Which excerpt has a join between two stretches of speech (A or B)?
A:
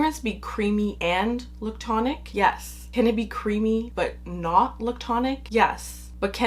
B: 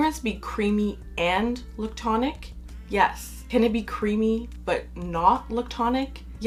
A